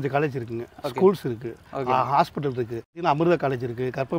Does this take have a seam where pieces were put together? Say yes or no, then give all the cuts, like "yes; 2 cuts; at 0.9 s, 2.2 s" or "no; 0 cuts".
yes; 1 cut; at 3.0 s